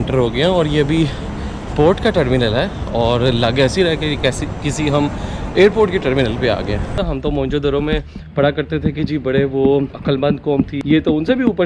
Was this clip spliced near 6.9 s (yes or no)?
yes